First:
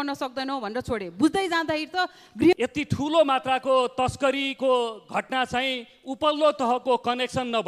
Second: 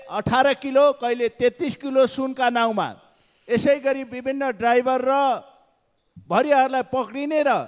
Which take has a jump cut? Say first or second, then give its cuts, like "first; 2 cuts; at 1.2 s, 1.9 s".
first; 1 cut; at 2.5 s